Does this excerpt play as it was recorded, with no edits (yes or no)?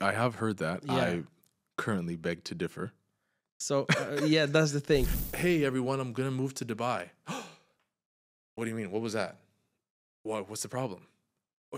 no